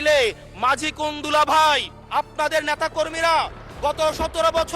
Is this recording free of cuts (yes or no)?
no